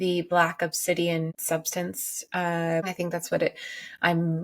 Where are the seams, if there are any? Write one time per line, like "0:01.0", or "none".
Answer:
0:01.4
0:02.8